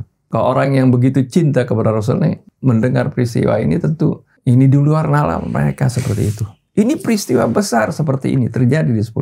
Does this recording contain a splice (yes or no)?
yes